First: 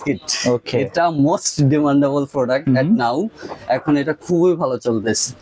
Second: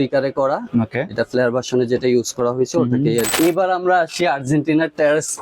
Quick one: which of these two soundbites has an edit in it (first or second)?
second